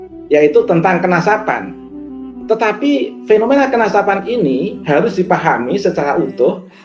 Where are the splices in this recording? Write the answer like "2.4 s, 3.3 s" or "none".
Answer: none